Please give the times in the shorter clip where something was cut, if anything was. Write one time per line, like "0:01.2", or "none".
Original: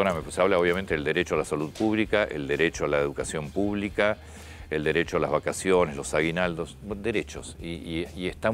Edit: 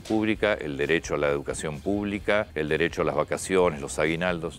0:02.5

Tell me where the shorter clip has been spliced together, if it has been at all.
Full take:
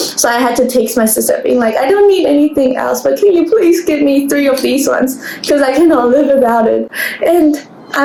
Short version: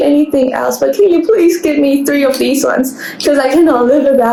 none

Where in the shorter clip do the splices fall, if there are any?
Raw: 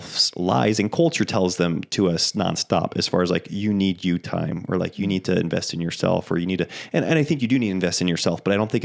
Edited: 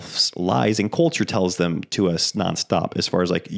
none

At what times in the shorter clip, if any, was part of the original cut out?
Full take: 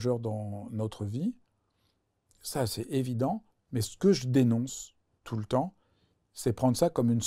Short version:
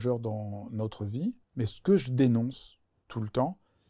0:01.4

